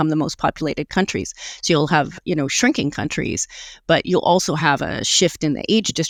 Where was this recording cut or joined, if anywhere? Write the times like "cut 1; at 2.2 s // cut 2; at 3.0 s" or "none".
none